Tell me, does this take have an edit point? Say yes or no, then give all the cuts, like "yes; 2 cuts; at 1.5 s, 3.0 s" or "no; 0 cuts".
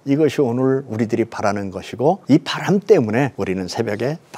yes; 2 cuts; at 2.2 s, 3.3 s